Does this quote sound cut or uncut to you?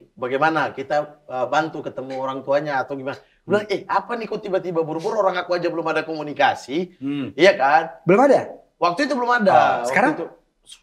uncut